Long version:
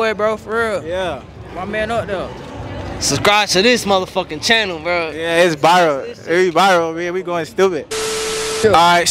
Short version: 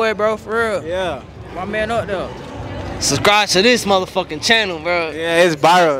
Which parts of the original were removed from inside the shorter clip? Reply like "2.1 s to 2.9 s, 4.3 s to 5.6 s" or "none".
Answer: none